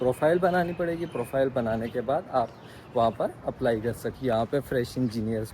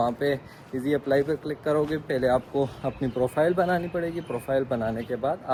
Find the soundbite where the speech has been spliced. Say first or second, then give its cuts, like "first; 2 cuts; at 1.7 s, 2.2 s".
first; 1 cut; at 4.1 s